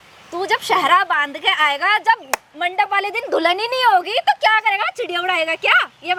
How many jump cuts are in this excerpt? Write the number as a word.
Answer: zero